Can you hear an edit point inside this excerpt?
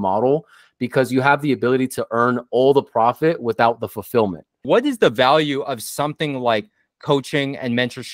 yes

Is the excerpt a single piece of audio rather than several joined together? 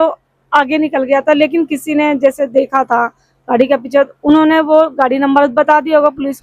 yes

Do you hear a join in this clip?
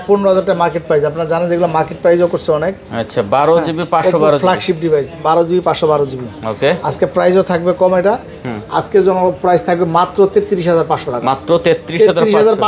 no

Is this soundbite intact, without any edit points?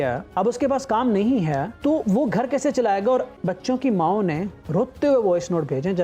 no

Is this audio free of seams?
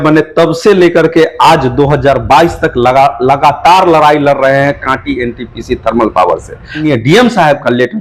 no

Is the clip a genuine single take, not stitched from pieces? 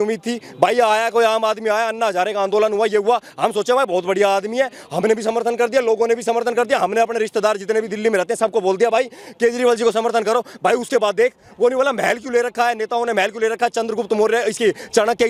yes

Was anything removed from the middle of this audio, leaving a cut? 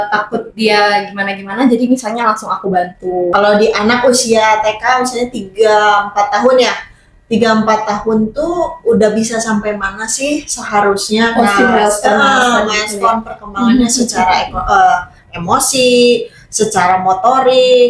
yes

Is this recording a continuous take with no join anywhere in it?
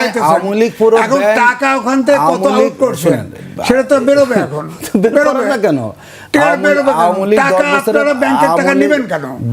yes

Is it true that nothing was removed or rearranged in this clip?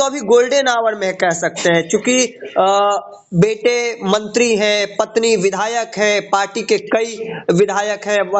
yes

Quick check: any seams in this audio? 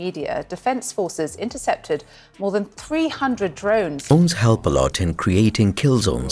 yes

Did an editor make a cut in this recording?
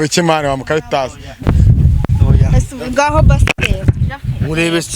yes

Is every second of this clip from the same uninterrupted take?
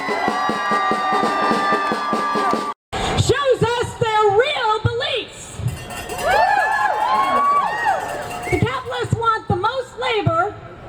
yes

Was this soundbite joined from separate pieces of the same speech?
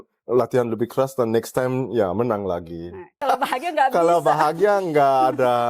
yes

